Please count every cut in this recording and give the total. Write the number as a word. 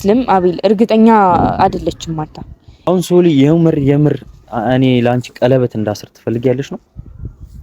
one